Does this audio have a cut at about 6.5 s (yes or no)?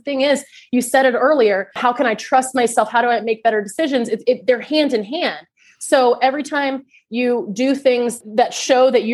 no